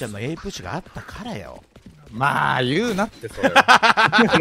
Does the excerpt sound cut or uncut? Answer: uncut